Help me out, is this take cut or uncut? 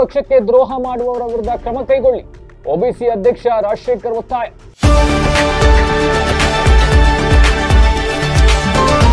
cut